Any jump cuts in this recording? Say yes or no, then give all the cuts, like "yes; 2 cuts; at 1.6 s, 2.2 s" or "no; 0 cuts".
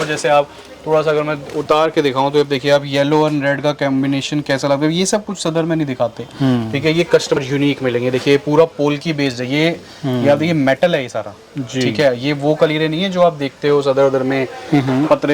yes; 1 cut; at 7.4 s